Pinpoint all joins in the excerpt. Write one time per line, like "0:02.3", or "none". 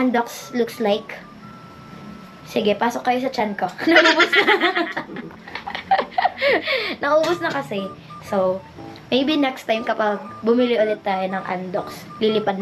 none